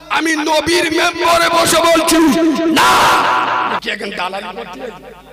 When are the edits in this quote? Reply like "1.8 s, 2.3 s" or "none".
3.8 s